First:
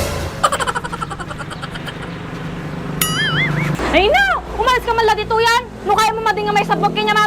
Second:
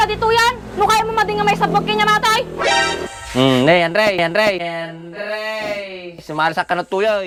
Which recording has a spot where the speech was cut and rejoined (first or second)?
first